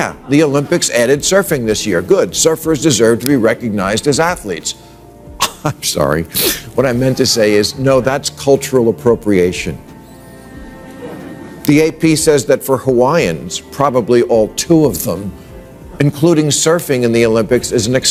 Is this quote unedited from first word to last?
yes; 0 cuts

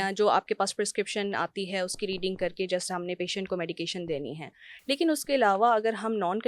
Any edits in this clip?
no; 0 cuts

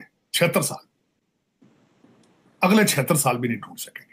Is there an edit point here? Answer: no; 0 cuts

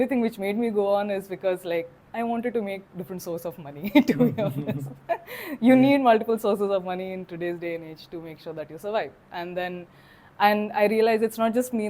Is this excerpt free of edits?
yes; 0 cuts

